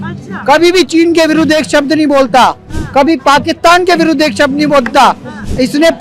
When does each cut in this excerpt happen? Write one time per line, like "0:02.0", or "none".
none